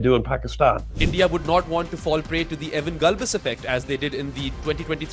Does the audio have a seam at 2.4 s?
no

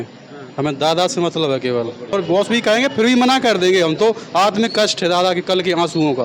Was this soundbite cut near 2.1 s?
yes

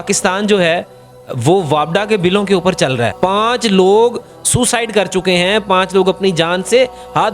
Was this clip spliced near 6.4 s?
no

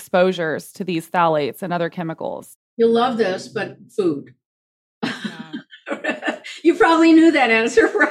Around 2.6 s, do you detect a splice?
yes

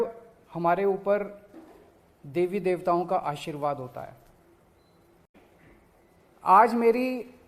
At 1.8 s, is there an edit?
no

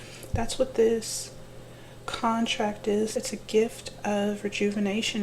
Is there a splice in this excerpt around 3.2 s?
yes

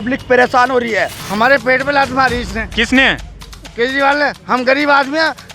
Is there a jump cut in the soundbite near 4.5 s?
no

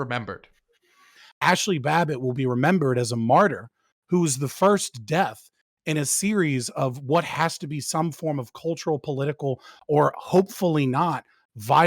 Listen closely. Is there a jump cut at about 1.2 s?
yes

